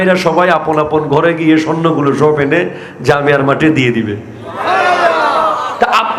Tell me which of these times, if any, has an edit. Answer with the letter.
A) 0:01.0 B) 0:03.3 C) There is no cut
C